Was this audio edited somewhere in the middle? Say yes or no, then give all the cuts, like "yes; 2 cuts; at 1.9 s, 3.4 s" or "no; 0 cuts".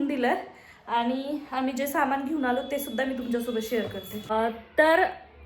yes; 1 cut; at 4.3 s